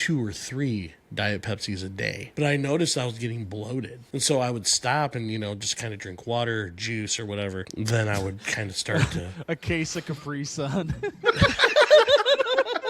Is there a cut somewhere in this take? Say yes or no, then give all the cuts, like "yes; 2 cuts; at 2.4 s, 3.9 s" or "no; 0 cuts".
yes; 3 cuts; at 2.2 s, 4.0 s, 7.7 s